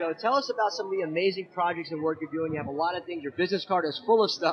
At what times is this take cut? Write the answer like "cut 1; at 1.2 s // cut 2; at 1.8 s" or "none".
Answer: cut 1; at 3.5 s